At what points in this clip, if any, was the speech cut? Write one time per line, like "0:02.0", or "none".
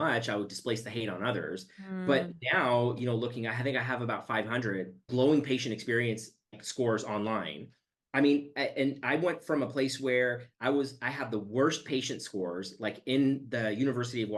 0:05.1
0:06.6